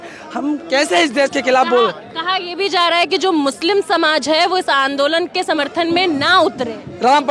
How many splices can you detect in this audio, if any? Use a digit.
0